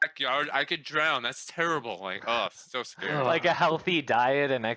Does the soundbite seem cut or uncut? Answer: uncut